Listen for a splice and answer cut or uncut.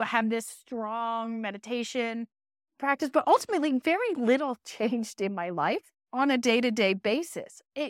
cut